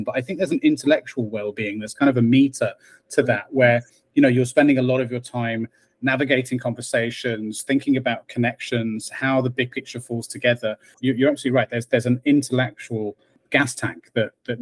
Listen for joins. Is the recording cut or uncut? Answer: cut